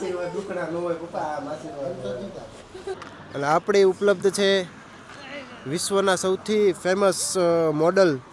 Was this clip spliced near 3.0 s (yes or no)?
yes